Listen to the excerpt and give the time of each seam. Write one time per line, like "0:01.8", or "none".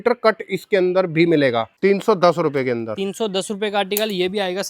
0:01.7